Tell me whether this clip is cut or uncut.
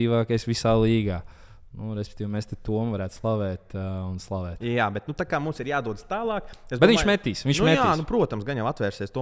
uncut